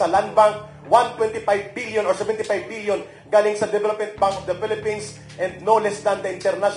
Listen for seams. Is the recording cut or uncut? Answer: uncut